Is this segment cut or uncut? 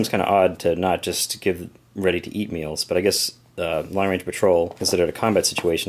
cut